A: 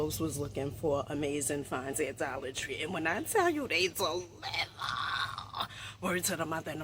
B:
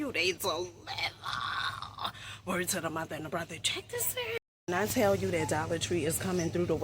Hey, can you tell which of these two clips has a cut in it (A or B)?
B